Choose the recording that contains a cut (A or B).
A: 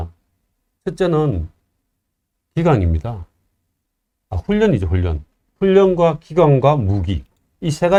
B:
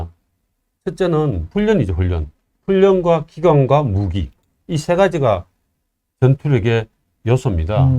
B